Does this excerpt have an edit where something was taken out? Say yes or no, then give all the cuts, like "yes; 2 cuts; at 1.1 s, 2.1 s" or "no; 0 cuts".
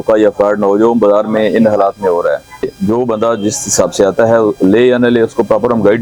yes; 1 cut; at 2.7 s